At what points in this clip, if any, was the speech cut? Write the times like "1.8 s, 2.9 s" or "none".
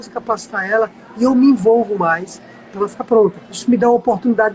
3.5 s